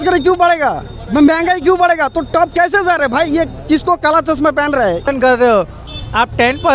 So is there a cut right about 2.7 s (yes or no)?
no